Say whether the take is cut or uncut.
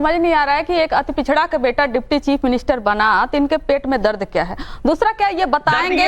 cut